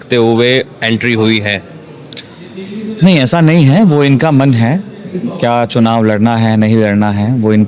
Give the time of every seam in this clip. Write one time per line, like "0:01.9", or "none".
none